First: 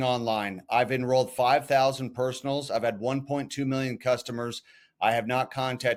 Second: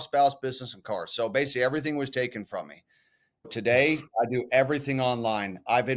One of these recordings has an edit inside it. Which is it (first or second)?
second